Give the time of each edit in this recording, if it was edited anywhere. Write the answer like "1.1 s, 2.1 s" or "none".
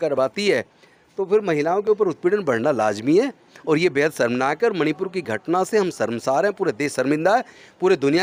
none

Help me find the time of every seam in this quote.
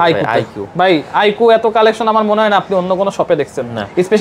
none

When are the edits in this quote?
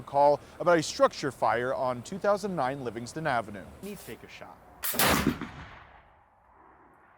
3.9 s

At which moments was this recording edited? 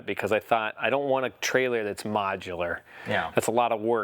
none

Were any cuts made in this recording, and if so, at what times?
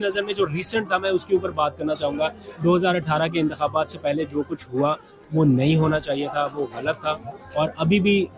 none

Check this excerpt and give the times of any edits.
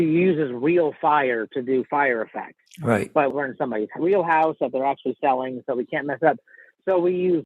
3.3 s

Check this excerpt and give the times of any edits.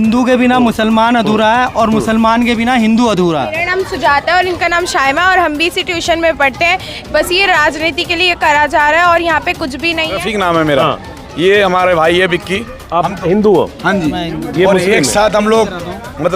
3.6 s, 10.2 s

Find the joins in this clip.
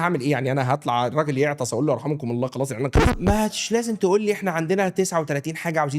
3.1 s

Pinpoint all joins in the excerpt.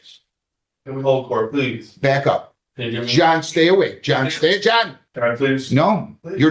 5.0 s

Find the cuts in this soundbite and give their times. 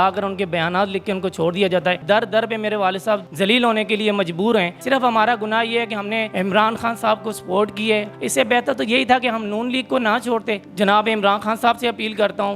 2.0 s, 3.3 s, 4.8 s, 6.3 s, 8.2 s, 10.7 s

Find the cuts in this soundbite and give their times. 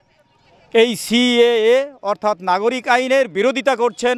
none

